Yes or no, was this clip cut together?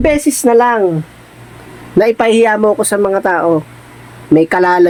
no